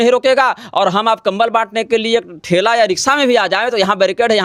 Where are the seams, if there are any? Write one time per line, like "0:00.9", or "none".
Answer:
none